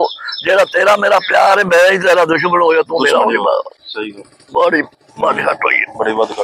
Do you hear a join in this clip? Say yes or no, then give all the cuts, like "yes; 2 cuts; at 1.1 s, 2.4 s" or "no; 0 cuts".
no; 0 cuts